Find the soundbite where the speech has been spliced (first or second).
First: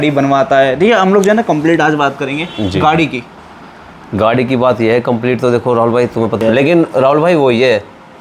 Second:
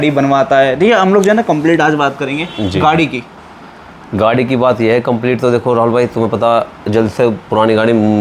first